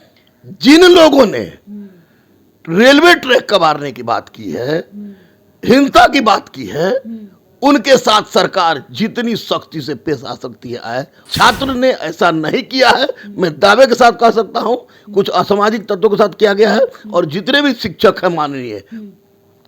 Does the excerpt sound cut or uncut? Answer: cut